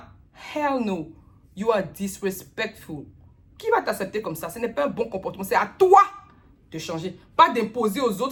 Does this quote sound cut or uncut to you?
uncut